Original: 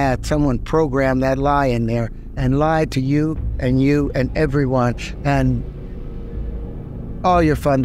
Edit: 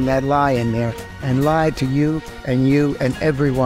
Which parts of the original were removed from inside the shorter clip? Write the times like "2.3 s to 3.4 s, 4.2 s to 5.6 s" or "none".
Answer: none